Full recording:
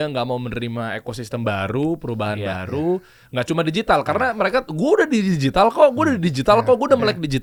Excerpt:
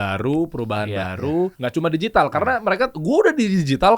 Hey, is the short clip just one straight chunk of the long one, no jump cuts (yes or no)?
no